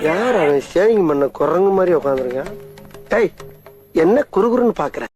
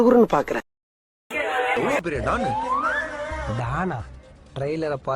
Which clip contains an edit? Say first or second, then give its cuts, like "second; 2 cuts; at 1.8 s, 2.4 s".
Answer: second; 1 cut; at 1.8 s